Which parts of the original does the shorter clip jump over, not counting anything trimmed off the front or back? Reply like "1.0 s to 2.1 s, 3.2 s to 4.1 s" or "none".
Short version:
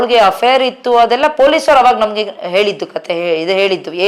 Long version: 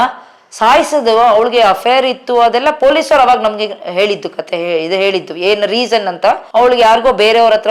none